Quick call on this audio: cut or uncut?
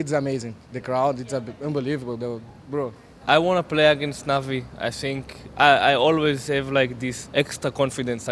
cut